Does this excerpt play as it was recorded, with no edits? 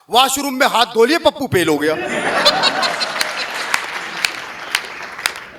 yes; 0 cuts

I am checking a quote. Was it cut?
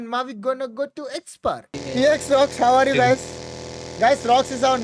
yes; 1 cut; at 1.8 s

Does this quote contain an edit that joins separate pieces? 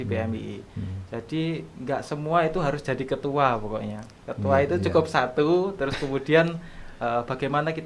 no; 0 cuts

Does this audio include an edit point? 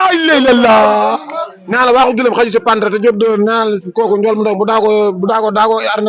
no; 0 cuts

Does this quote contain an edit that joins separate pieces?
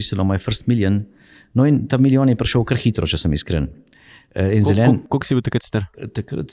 no; 0 cuts

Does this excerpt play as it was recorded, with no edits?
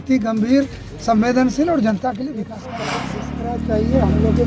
no; 1 cut; at 3.0 s

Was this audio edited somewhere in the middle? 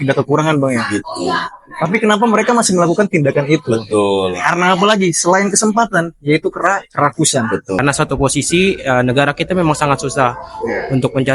yes; 1 cut; at 7.7 s

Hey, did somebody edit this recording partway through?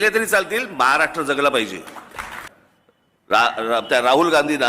yes; 1 cut; at 2.3 s

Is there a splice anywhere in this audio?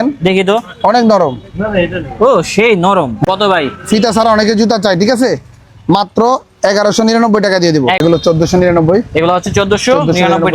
yes; 2 cuts; at 3.3 s, 8.0 s

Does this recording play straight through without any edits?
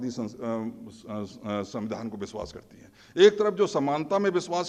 yes; 0 cuts

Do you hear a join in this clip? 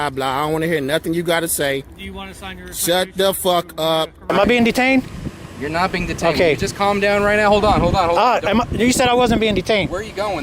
yes; 1 cut; at 4.3 s

